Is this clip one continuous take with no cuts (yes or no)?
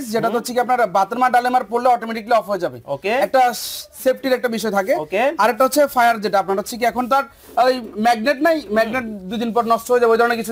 yes